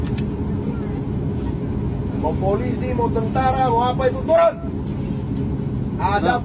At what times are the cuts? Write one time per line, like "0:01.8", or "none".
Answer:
none